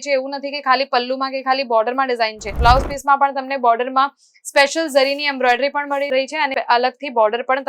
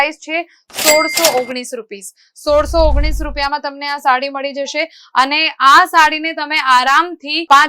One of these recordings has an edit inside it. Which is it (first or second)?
first